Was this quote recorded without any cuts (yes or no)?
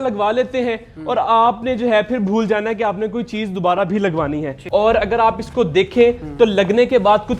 no